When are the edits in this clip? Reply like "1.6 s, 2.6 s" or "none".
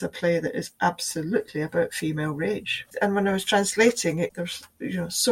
2.9 s

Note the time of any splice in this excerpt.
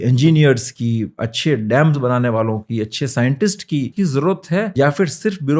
3.9 s, 4.7 s

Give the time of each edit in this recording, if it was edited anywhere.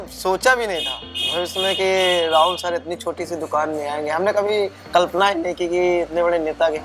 none

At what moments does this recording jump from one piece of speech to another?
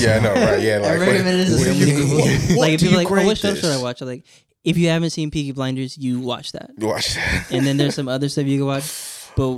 none

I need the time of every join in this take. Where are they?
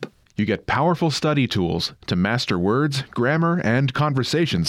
none

